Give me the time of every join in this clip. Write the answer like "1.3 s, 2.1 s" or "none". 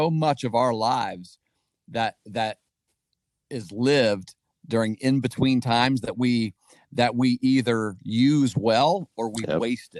none